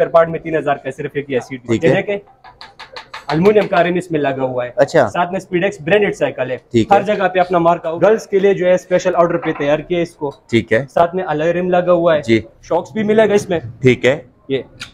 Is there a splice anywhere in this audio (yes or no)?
yes